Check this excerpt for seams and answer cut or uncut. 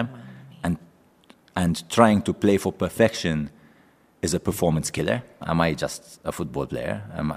cut